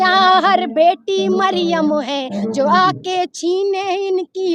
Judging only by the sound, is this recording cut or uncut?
uncut